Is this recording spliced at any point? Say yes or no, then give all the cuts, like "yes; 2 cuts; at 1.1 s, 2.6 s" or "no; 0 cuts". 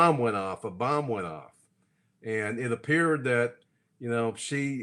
no; 0 cuts